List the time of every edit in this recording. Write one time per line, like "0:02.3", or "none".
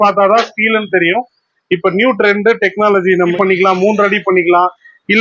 0:03.3